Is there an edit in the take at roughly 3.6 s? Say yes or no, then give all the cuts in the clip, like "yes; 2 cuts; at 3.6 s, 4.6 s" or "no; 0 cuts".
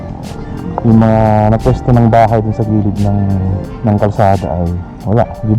yes; 1 cut; at 3.6 s